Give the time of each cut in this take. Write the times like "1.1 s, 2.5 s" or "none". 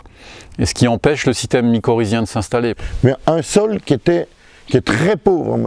2.8 s